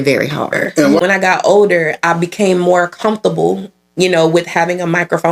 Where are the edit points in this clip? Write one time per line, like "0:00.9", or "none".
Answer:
0:01.0